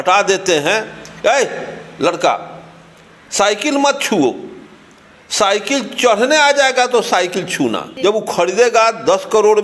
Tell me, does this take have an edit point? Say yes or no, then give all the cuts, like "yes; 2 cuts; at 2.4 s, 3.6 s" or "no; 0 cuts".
yes; 1 cut; at 7.9 s